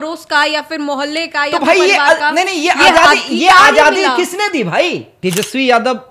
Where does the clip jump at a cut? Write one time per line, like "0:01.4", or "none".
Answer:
0:05.1